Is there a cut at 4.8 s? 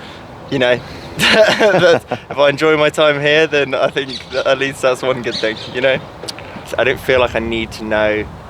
no; 1 cut; at 6.7 s

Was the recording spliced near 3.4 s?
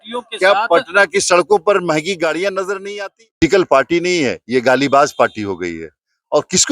yes; 1 cut; at 3.4 s

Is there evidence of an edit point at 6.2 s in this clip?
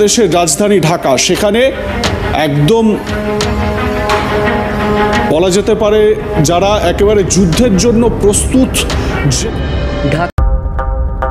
no; 1 cut; at 10.3 s

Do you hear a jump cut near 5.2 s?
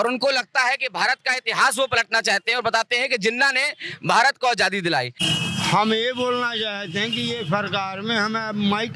yes; 1 cut; at 5.2 s

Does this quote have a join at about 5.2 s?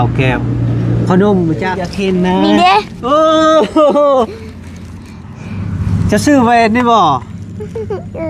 no; 1 cut; at 1.9 s

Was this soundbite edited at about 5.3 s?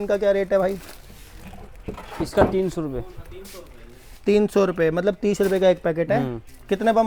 no; 0 cuts

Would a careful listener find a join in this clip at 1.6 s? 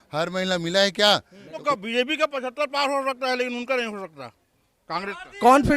yes; 1 cut; at 1.6 s

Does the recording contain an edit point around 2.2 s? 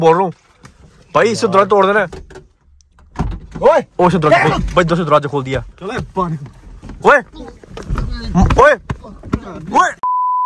no; 0 cuts

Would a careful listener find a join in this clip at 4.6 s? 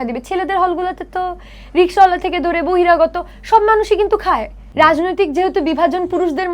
yes; 1 cut; at 4.6 s

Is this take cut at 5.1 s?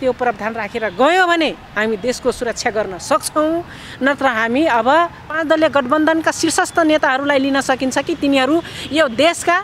yes; 1 cut; at 5.1 s

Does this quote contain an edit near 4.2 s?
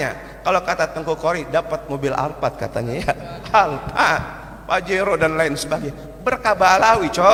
no; 0 cuts

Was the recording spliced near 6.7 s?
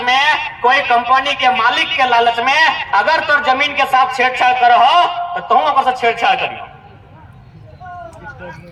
no; 0 cuts

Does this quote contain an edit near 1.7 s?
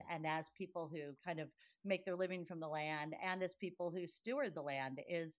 no; 0 cuts

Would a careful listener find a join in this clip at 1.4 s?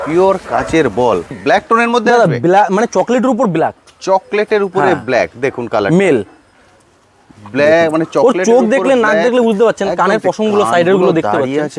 yes; 1 cut; at 1.4 s

